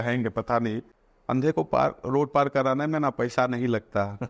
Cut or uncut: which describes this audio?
cut